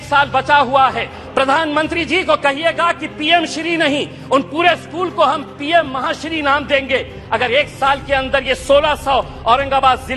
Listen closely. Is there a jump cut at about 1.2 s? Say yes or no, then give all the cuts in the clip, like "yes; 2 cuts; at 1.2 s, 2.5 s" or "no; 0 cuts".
yes; 1 cut; at 1.2 s